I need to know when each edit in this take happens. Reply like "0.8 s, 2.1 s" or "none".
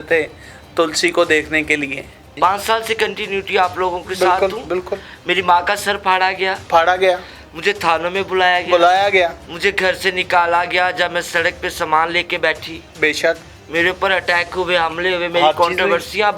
2.4 s